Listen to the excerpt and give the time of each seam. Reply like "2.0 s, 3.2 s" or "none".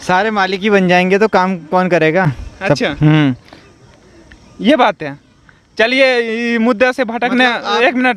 none